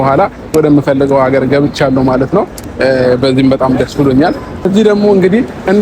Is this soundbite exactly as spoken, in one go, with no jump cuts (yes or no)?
no